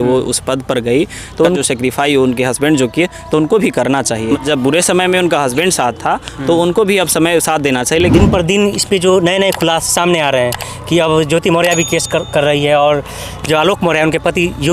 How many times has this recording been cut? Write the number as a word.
three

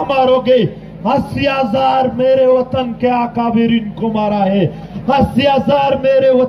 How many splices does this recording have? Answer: one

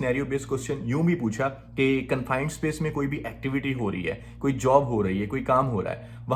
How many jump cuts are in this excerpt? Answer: zero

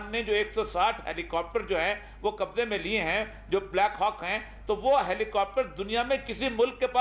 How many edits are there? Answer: zero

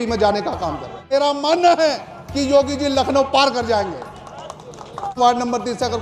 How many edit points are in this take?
two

